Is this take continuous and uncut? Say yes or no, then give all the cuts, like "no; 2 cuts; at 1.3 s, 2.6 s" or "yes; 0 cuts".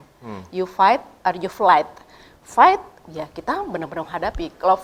yes; 0 cuts